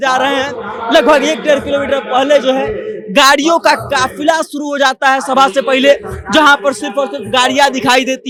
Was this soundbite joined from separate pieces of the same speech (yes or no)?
no